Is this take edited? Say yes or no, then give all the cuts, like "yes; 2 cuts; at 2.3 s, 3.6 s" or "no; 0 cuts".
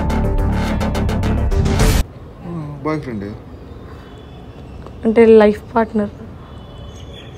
no; 0 cuts